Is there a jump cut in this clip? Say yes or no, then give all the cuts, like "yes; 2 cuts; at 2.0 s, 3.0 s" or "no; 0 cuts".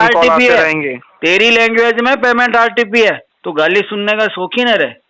yes; 1 cut; at 3.3 s